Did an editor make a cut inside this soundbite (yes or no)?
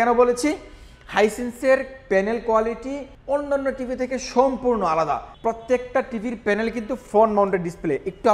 yes